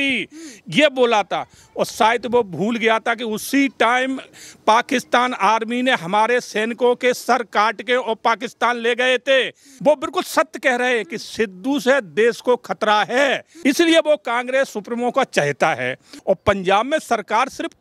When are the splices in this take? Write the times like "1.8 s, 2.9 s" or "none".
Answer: 9.6 s, 13.5 s, 16.1 s